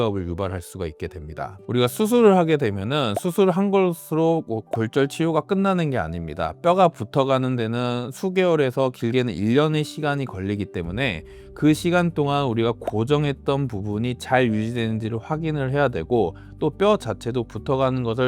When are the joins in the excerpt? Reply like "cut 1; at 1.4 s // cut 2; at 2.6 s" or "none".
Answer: cut 1; at 1.5 s